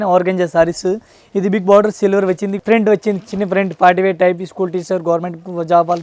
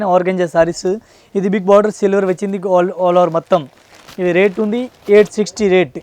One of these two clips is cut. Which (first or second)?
first